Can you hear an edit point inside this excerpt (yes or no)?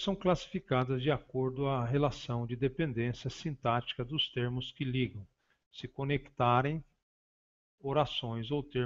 no